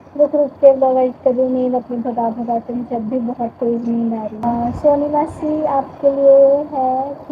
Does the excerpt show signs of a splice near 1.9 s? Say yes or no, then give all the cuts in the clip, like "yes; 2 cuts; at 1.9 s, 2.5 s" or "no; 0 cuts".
no; 1 cut; at 4.4 s